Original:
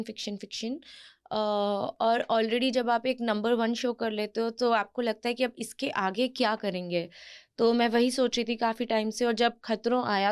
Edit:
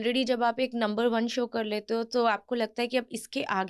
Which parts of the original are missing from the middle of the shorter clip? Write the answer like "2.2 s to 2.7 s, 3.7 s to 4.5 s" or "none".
none